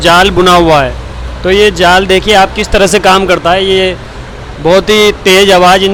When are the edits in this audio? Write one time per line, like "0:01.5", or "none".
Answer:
none